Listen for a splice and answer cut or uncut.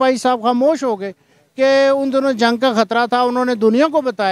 uncut